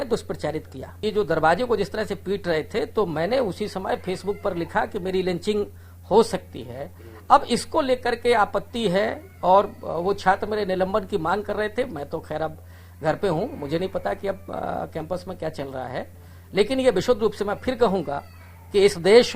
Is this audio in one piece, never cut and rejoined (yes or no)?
no